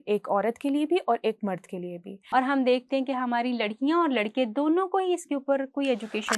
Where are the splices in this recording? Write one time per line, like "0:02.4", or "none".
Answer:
0:02.2